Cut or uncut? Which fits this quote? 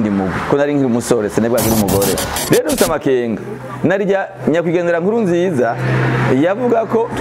cut